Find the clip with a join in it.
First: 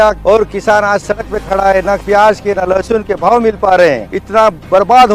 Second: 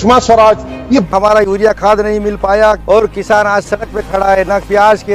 second; 1 cut; at 1.1 s

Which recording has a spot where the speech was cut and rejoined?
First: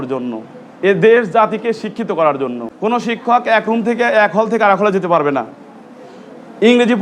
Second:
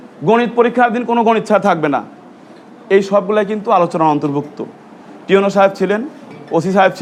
first; 1 cut; at 2.7 s

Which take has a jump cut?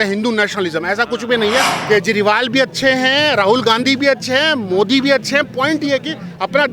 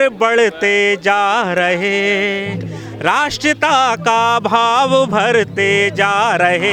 first; 1 cut; at 1.7 s

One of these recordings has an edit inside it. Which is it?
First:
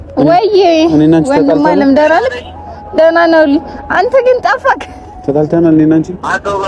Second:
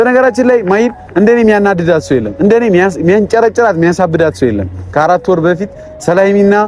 second; 1 cut; at 4.8 s

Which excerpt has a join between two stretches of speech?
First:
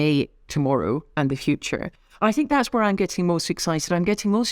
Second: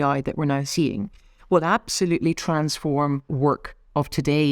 second; 1 cut; at 3.3 s

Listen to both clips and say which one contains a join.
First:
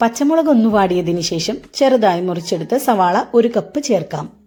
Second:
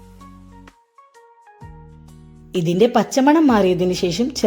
second; 2 cuts; at 1.3 s, 2.5 s

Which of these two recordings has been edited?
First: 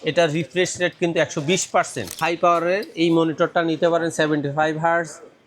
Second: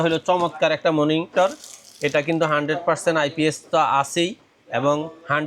first; 1 cut; at 2.2 s

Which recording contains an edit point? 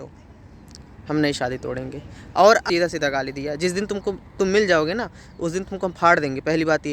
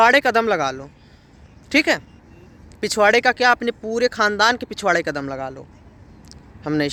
first; 1 cut; at 2.6 s

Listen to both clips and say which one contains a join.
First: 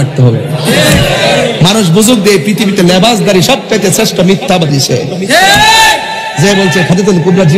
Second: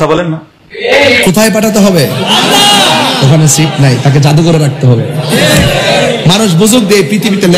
second; 1 cut; at 1.2 s

